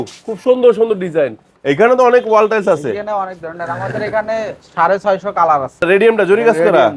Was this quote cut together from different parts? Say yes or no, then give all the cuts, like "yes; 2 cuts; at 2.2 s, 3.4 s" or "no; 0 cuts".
yes; 2 cuts; at 1.5 s, 5.8 s